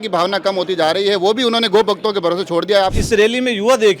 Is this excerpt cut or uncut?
cut